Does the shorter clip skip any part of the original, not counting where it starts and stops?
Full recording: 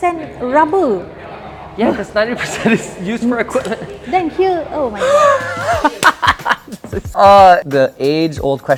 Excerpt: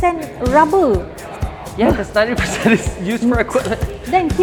no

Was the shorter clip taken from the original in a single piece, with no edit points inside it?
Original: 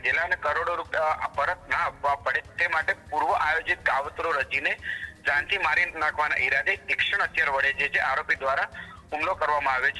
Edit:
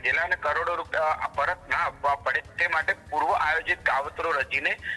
yes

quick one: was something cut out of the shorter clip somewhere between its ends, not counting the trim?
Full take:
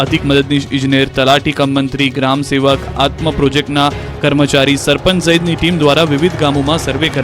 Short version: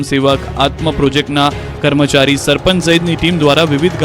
no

